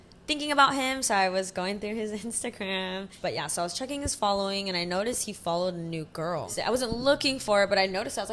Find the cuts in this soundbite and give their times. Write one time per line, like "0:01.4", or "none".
0:03.1
0:06.5

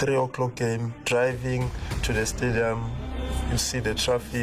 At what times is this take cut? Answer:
0:00.9

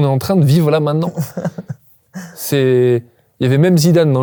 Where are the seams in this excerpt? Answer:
none

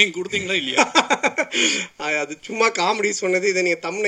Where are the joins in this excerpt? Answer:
none

